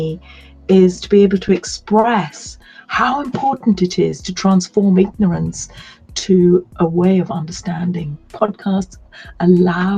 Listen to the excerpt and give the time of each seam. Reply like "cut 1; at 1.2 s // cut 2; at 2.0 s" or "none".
cut 1; at 8.3 s